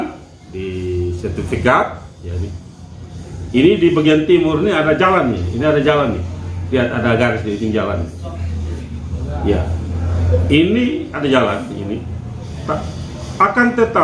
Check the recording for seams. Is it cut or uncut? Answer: uncut